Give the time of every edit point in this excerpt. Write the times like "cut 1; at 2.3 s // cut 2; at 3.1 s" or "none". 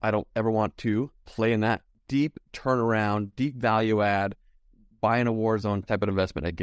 cut 1; at 1.9 s // cut 2; at 5.8 s